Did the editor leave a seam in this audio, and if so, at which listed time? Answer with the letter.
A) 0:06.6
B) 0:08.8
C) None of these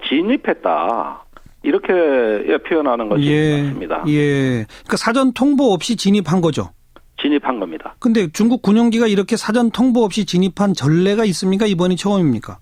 C